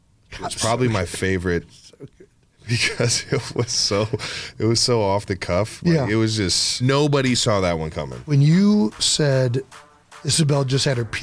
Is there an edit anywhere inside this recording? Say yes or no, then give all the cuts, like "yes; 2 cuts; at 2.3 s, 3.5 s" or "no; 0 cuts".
yes; 1 cut; at 6.8 s